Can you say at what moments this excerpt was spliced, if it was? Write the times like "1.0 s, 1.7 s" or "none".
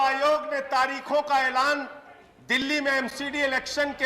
none